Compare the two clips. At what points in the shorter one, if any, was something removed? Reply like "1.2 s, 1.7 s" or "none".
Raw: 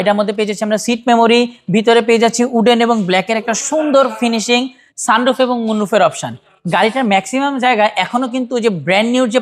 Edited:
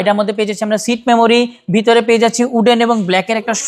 none